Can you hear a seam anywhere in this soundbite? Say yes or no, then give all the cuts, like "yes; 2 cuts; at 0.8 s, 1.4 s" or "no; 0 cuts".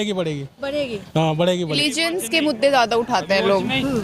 yes; 1 cut; at 1.8 s